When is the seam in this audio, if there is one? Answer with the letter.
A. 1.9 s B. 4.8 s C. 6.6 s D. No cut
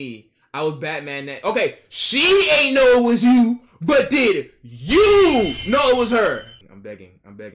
C